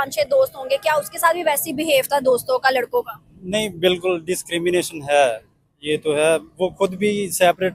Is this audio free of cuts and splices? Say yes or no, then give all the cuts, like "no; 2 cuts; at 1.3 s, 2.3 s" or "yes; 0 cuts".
yes; 0 cuts